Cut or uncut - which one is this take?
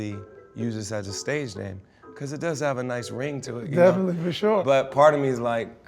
cut